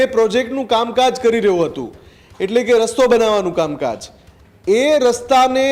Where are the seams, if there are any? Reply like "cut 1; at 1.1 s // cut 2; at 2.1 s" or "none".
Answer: none